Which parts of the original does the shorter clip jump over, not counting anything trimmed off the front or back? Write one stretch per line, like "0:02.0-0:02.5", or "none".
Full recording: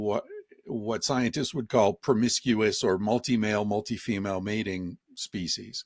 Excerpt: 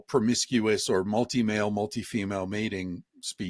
none